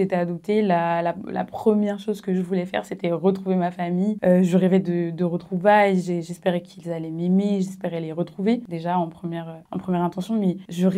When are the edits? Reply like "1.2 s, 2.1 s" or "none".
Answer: none